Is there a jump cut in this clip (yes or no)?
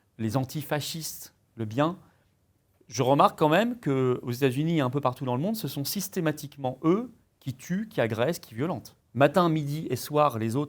yes